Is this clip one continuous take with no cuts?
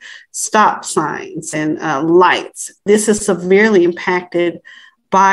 yes; 0 cuts

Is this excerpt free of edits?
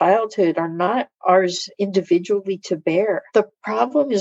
no; 1 cut; at 3.2 s

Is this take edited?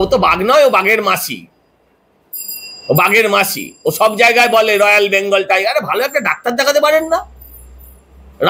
no; 0 cuts

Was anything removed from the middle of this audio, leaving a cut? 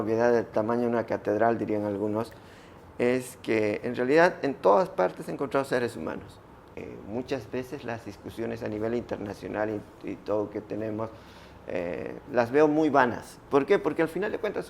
yes; 1 cut; at 6.8 s

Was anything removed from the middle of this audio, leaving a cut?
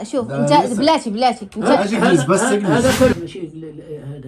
yes; 1 cut; at 3.1 s

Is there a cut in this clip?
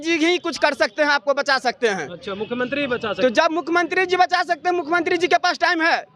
no; 0 cuts

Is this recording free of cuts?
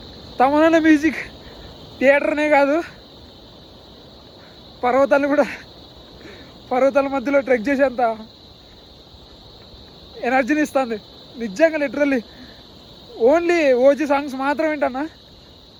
yes; 0 cuts

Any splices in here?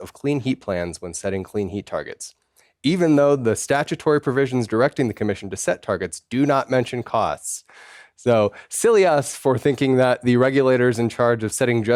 no; 0 cuts

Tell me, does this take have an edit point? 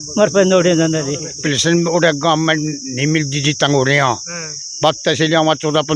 yes; 1 cut; at 1.4 s

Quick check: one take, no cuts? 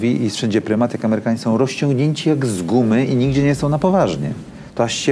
yes; 0 cuts

